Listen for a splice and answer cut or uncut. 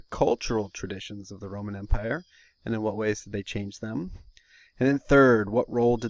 uncut